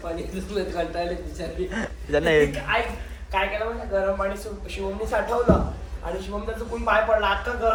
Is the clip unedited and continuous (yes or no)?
yes